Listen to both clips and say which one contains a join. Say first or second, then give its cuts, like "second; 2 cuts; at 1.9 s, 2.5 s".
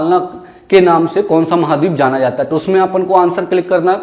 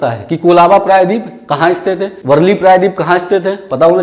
second; 1 cut; at 2.1 s